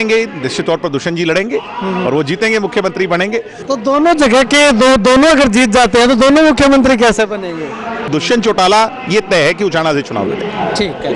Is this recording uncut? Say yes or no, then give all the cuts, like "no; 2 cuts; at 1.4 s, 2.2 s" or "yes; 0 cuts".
no; 2 cuts; at 3.6 s, 8.1 s